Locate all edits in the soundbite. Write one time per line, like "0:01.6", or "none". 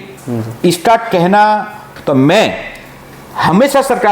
0:01.9